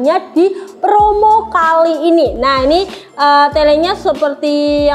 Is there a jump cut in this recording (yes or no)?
no